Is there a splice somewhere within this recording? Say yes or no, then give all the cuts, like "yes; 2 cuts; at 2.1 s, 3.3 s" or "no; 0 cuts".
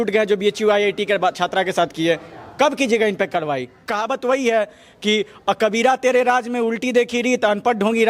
yes; 1 cut; at 3.9 s